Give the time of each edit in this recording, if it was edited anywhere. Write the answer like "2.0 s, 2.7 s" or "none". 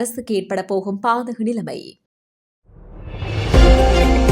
2.1 s